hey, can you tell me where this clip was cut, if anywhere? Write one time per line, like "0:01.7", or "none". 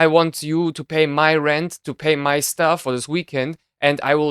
0:02.8